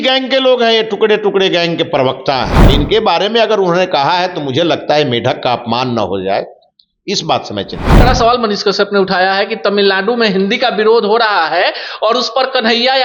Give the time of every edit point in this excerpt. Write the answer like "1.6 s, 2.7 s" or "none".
2.6 s, 7.9 s